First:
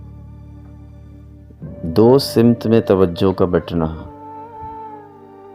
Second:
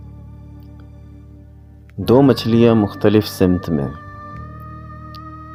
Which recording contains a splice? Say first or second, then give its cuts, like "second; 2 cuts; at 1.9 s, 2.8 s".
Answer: first; 1 cut; at 1.7 s